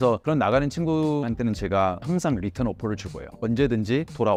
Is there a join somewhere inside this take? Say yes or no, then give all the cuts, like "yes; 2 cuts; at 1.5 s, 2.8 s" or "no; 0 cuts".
no; 0 cuts